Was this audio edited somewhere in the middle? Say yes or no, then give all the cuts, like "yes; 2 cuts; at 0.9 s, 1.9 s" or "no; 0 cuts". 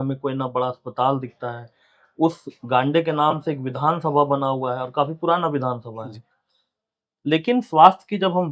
no; 0 cuts